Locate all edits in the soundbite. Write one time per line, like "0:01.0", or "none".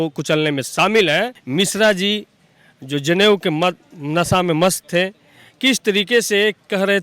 0:01.4